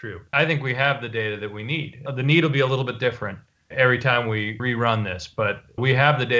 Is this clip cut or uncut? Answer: cut